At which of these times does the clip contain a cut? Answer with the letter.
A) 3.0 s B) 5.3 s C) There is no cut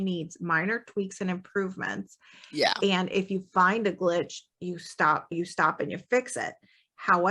B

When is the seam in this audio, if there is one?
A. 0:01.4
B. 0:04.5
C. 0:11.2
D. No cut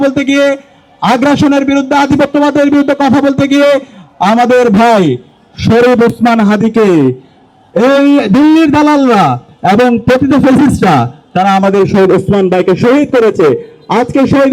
D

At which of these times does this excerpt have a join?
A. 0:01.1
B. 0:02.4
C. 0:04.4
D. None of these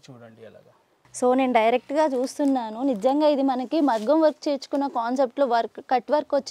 A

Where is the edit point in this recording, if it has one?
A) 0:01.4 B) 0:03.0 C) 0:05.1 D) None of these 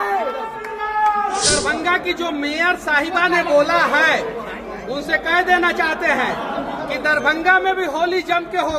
A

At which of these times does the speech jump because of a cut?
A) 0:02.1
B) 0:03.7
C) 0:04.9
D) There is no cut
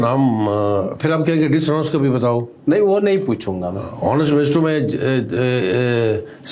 D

